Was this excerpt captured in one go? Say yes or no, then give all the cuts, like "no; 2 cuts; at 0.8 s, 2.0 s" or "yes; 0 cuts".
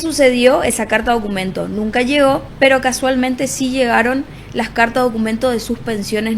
no; 1 cut; at 2.5 s